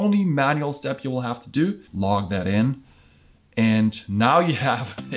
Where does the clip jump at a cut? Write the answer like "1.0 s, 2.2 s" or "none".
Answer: 1.8 s